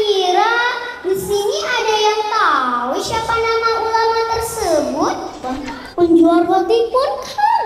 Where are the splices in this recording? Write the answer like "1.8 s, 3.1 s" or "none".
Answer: 5.4 s